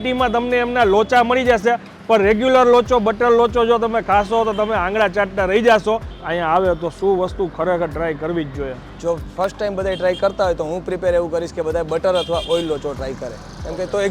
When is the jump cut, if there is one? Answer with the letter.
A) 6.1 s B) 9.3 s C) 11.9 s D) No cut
A